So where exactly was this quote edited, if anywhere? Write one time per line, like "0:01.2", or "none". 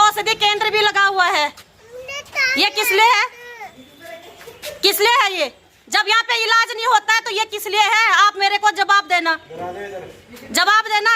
none